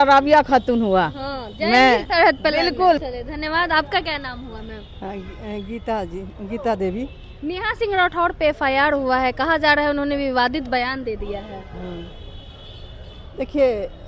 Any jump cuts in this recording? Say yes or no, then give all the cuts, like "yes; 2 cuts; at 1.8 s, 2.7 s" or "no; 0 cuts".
no; 0 cuts